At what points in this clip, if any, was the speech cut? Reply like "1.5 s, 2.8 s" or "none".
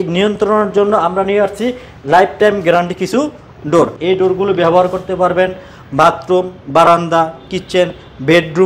4.0 s